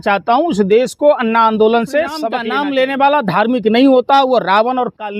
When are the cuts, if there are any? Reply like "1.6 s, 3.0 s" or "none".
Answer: 2.4 s